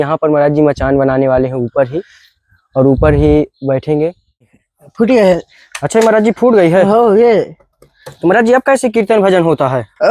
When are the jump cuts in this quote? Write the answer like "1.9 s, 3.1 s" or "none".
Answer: 4.6 s